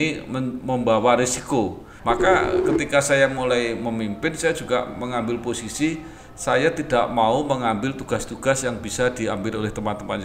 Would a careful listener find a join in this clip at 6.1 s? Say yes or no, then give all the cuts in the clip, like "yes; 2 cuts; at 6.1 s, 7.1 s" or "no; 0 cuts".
no; 1 cut; at 1.9 s